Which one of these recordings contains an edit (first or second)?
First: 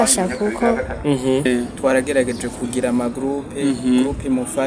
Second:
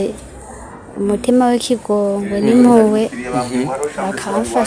first